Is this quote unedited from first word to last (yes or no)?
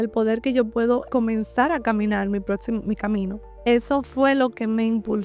no